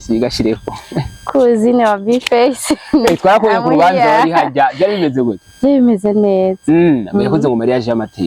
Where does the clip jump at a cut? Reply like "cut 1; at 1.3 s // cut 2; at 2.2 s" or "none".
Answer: none

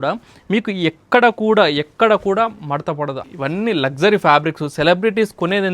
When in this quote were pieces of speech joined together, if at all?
cut 1; at 3.2 s

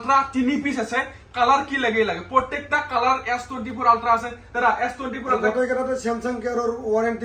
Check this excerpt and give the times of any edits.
none

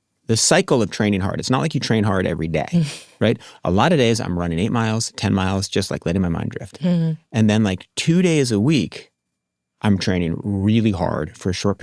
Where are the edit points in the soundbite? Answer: none

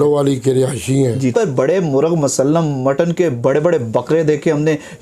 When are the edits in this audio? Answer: cut 1; at 1.2 s

